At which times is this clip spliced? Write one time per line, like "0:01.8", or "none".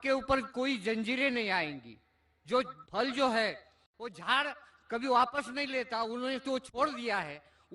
0:03.4